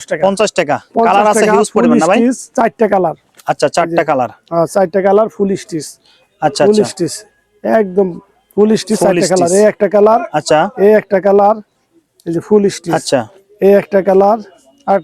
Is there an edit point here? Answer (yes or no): no